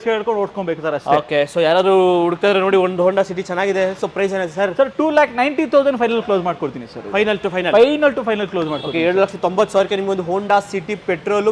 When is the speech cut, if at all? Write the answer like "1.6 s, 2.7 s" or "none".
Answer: none